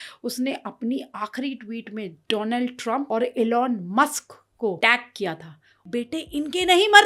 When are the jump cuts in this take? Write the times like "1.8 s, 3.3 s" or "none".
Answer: 3.1 s, 4.8 s, 5.9 s